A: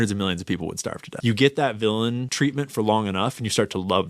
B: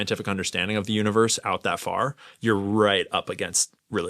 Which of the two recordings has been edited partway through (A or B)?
A